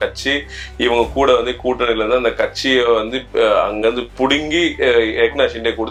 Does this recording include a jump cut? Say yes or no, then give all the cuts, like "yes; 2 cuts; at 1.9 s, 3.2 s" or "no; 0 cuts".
no; 0 cuts